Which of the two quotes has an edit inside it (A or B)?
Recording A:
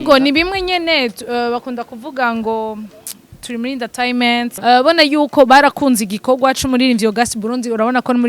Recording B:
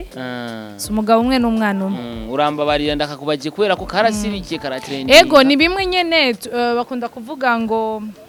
A